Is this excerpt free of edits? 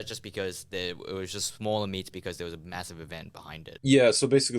no; 1 cut; at 3.7 s

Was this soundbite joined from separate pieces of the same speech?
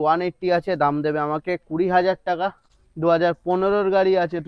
yes; 1 cut; at 2.6 s

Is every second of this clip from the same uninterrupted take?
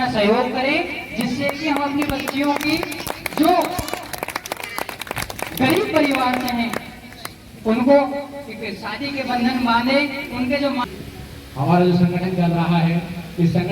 no; 1 cut; at 10.9 s

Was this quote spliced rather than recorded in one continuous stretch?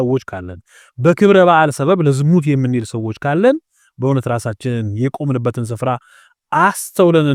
no; 0 cuts

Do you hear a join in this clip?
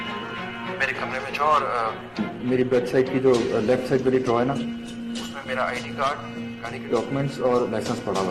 no; 0 cuts

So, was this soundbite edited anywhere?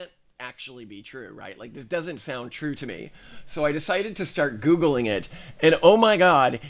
no; 0 cuts

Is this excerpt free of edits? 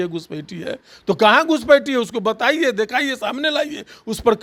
yes; 0 cuts

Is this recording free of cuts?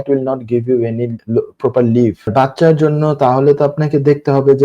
no; 2 cuts; at 1.2 s, 2.3 s

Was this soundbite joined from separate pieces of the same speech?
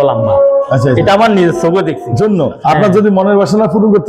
yes; 1 cut; at 2.0 s

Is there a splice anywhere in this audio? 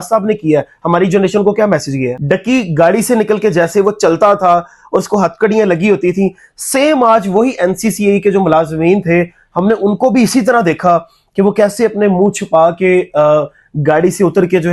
yes; 1 cut; at 2.2 s

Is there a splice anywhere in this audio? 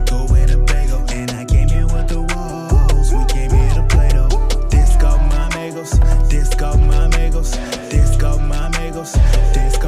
no; 0 cuts

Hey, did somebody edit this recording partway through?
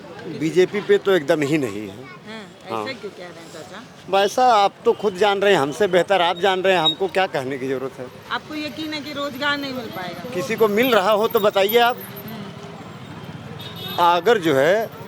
no; 0 cuts

